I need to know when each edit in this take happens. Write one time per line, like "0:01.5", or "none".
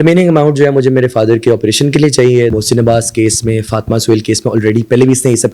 0:02.5